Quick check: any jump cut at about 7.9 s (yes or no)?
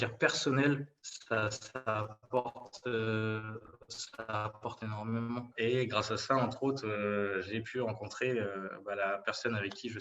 no